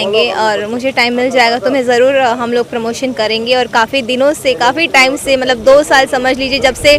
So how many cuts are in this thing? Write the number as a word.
zero